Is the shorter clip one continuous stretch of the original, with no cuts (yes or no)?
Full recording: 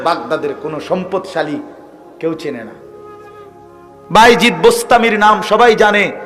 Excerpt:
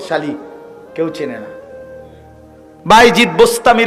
yes